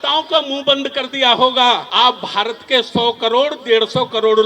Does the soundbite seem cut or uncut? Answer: cut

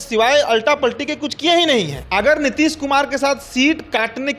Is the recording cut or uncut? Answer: cut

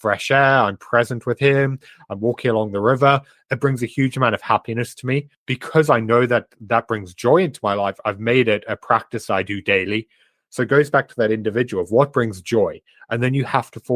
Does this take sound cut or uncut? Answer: cut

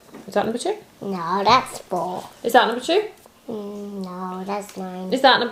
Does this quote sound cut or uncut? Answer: uncut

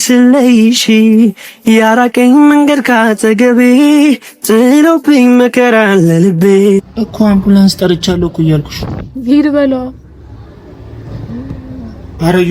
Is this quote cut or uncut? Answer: cut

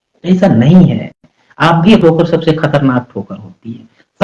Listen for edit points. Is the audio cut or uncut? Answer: cut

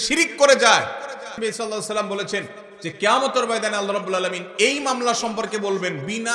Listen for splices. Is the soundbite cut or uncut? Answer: cut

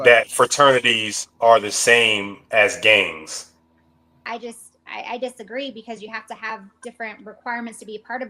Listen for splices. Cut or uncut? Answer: cut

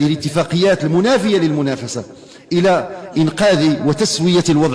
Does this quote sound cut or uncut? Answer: uncut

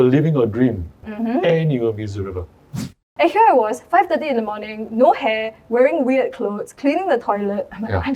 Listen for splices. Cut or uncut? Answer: cut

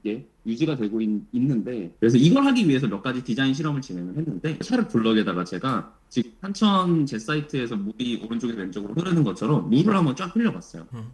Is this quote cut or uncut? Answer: cut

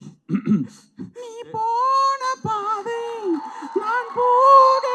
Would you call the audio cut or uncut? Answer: uncut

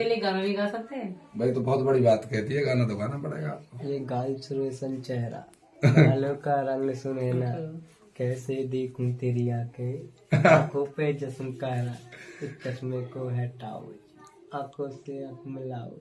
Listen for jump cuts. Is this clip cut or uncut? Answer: uncut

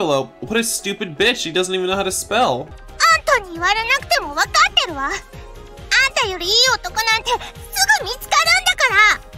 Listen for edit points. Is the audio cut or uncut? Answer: cut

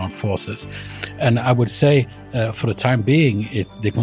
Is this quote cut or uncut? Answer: uncut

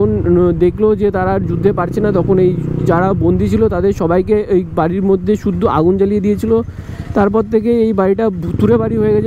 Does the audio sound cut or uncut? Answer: uncut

